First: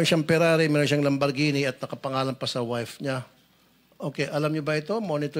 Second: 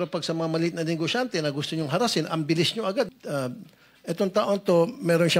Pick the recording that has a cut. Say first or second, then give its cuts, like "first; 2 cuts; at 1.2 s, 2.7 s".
second; 1 cut; at 3.1 s